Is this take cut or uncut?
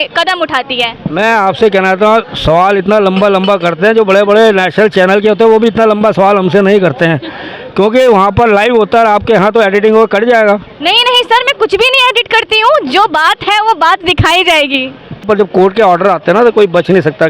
cut